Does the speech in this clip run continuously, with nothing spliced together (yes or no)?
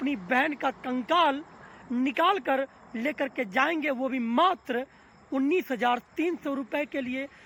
yes